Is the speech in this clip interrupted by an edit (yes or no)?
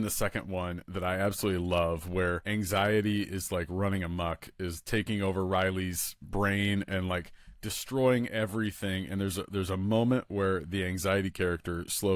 yes